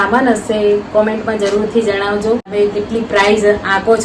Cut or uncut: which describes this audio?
cut